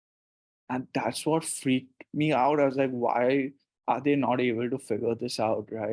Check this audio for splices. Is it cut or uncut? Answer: uncut